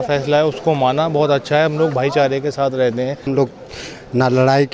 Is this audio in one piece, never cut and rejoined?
no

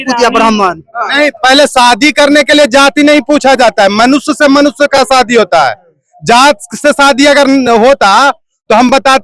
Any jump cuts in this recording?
no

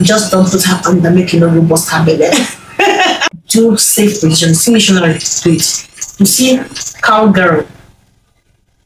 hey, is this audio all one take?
no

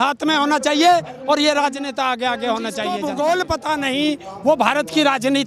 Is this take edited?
yes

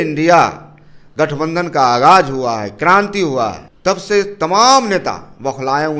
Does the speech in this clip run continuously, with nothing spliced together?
no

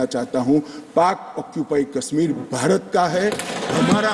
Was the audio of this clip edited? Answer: no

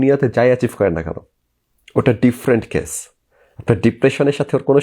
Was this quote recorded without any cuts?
yes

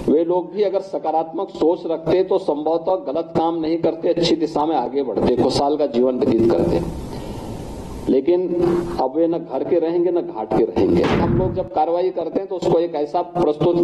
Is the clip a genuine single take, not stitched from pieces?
no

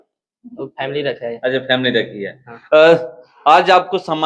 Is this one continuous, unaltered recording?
yes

